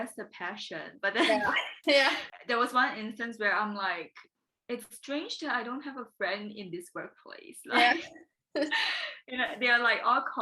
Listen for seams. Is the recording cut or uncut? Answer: cut